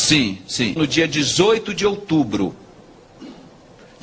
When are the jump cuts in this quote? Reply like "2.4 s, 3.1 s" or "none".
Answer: none